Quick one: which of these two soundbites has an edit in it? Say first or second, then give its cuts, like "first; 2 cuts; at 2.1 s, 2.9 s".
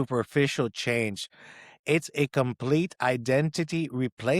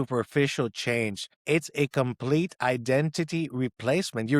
second; 1 cut; at 1.3 s